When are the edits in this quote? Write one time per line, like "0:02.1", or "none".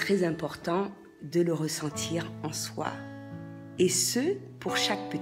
none